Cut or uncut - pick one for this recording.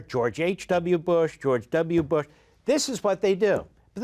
uncut